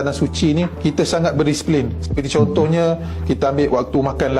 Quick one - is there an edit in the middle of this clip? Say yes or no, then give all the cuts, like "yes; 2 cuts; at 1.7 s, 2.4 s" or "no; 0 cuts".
no; 0 cuts